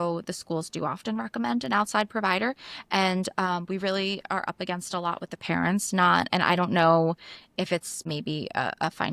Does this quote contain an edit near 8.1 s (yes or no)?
yes